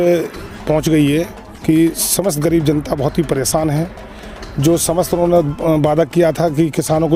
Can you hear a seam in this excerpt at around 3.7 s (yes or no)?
no